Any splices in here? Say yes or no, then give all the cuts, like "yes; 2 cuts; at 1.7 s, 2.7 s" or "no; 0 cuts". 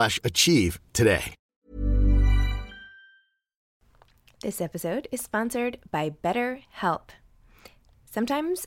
no; 0 cuts